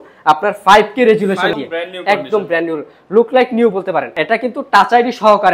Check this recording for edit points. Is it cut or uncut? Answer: cut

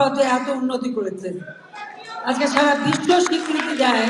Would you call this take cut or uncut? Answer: uncut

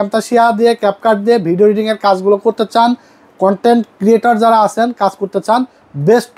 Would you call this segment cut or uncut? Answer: uncut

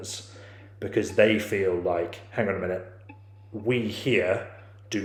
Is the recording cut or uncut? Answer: uncut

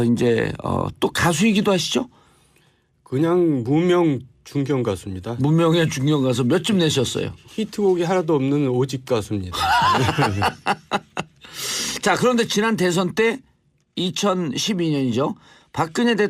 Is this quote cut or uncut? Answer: cut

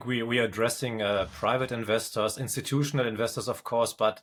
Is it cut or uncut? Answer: uncut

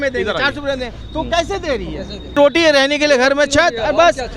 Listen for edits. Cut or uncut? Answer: cut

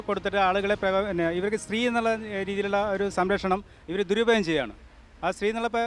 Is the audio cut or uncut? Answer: uncut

